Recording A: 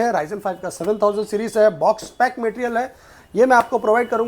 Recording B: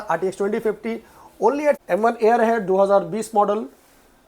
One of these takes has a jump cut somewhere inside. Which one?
B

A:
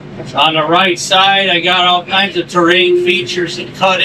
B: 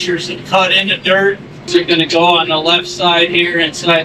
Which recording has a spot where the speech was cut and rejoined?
B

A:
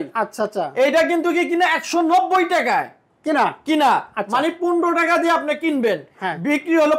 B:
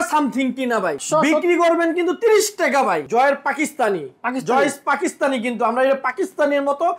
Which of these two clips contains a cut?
B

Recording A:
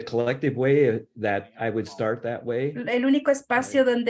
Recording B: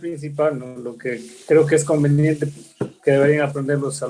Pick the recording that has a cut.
A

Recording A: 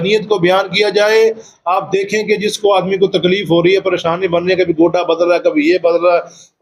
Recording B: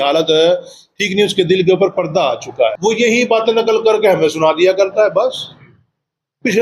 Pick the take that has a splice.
B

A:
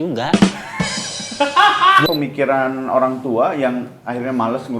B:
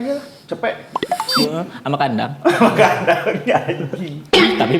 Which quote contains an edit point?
A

